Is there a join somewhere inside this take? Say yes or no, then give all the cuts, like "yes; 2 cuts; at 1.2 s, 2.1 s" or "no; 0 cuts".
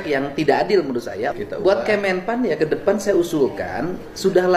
yes; 1 cut; at 1.3 s